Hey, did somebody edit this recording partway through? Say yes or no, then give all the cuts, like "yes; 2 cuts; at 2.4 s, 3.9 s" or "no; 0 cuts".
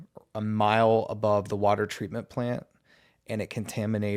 no; 0 cuts